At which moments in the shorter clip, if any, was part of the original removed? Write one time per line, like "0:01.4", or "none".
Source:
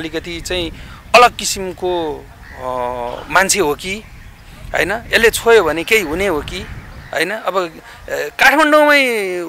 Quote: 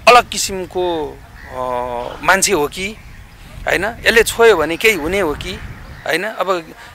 none